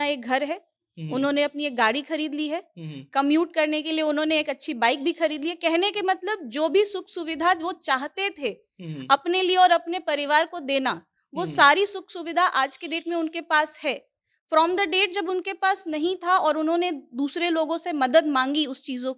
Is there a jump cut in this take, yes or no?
no